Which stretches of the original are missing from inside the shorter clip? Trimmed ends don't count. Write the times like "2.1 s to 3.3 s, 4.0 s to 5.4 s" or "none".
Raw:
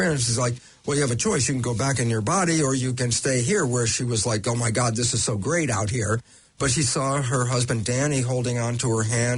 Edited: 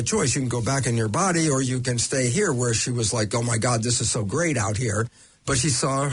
none